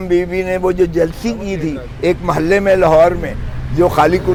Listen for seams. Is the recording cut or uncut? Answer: uncut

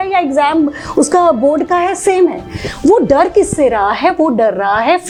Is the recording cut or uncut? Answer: uncut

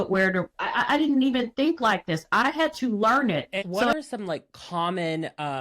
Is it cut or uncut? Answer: cut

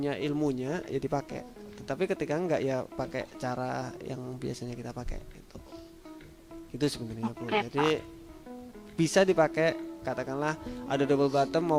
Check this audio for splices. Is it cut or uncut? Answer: uncut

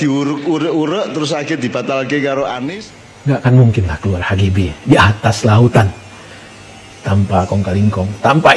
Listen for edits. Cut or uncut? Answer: cut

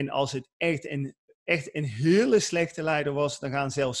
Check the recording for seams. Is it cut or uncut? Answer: uncut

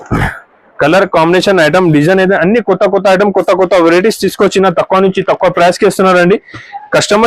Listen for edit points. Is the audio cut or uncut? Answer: uncut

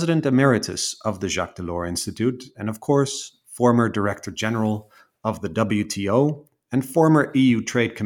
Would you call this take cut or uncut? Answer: uncut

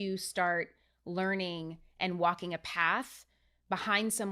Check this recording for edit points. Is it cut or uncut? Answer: uncut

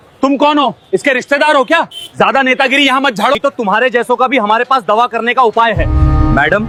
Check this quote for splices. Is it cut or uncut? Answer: uncut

